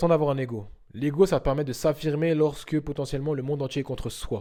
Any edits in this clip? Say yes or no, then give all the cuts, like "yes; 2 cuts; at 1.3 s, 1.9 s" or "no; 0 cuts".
no; 0 cuts